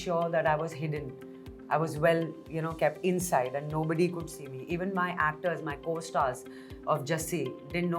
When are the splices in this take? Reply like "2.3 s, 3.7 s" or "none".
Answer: none

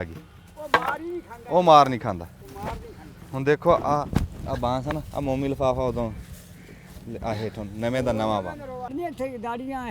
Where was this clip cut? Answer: 8.9 s

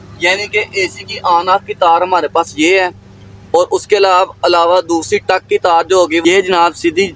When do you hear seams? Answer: 6.2 s

